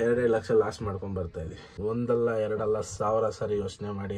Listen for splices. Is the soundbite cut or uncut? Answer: cut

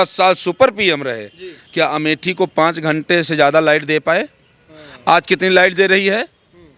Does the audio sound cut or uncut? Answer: uncut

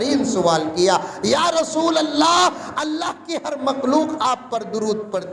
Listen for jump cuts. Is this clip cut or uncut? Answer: uncut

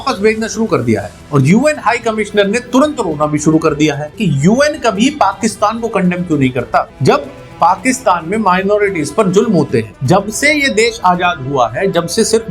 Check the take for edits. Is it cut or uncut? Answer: cut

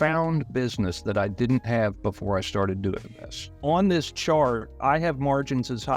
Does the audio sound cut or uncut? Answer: cut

